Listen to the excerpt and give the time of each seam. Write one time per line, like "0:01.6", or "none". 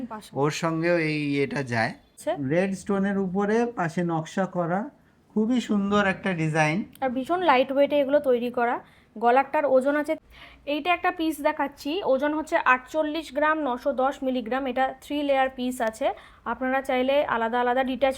0:02.2
0:10.2